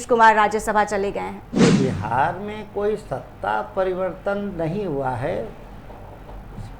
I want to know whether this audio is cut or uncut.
cut